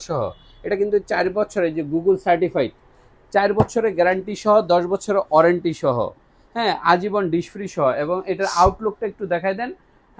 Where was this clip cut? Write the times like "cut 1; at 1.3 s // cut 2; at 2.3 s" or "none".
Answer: none